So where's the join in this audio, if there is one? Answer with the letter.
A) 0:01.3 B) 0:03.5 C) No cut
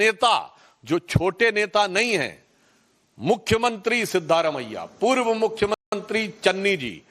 C